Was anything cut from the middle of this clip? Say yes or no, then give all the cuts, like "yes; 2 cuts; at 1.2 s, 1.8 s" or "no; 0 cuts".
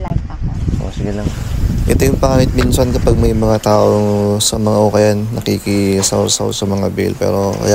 no; 0 cuts